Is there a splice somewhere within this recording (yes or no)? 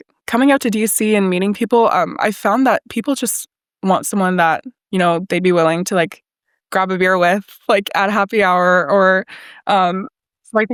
no